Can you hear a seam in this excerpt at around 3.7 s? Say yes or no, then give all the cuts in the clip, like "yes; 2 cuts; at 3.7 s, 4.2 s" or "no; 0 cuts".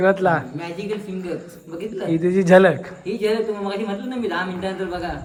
no; 0 cuts